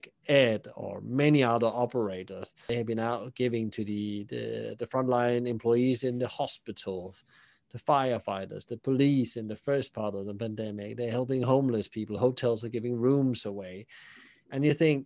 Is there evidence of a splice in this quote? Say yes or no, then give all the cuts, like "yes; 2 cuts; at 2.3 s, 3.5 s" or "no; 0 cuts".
yes; 1 cut; at 2.7 s